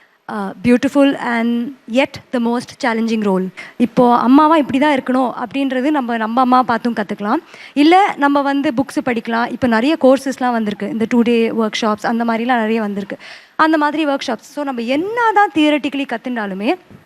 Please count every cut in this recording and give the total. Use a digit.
1